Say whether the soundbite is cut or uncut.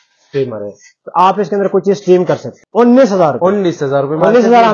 cut